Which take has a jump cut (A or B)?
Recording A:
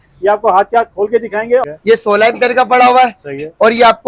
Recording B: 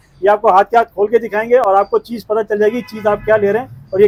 A